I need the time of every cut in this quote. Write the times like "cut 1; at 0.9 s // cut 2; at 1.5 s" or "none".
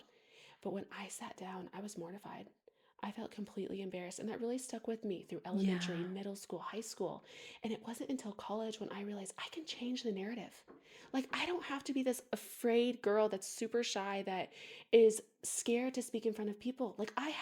none